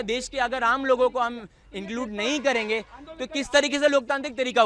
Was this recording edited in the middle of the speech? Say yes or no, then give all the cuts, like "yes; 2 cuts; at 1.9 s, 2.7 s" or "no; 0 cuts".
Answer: no; 0 cuts